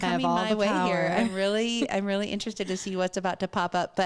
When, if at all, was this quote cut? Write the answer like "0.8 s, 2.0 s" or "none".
none

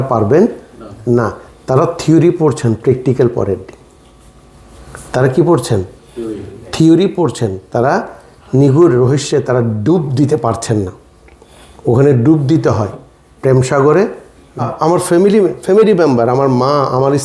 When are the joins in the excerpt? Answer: 14.7 s

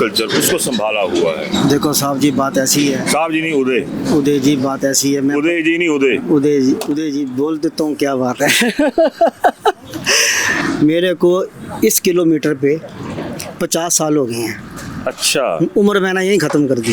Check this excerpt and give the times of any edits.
none

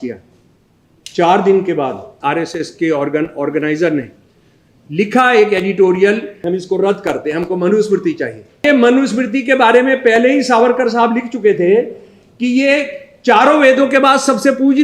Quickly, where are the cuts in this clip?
2.2 s, 6.3 s, 8.6 s

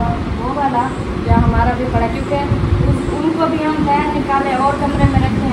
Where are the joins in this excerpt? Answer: none

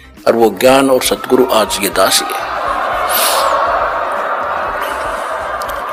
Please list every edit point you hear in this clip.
none

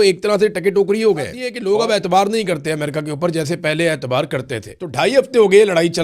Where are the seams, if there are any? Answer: 1.5 s, 4.8 s

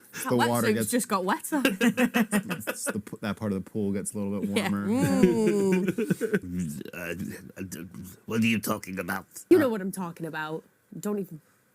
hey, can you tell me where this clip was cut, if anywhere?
6.4 s, 9.5 s

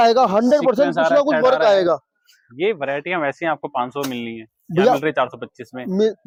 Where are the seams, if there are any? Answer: none

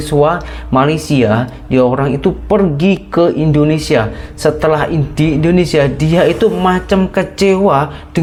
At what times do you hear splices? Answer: none

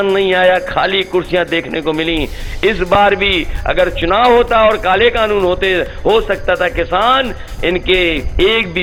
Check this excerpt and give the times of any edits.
none

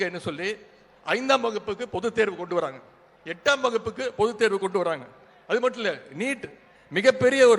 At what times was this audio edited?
none

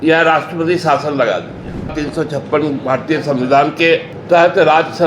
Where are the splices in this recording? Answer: 1.9 s, 4.1 s

